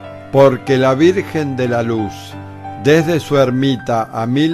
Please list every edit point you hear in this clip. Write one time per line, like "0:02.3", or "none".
none